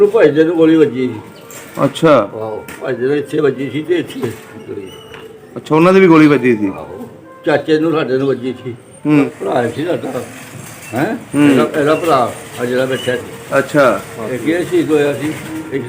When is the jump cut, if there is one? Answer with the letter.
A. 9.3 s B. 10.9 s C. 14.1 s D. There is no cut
A